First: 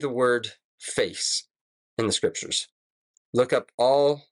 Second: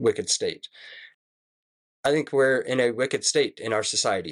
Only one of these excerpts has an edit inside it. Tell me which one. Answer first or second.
second